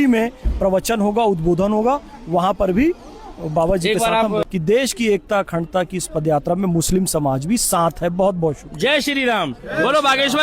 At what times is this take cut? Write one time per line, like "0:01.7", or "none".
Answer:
0:04.4